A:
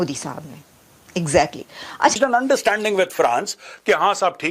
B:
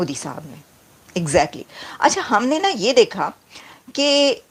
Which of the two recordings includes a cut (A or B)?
A